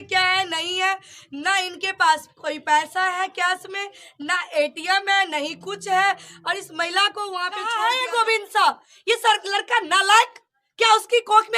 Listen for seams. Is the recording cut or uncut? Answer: cut